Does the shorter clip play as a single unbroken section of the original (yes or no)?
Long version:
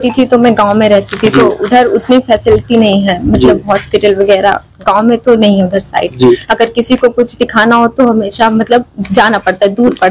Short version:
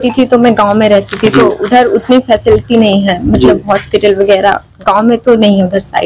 yes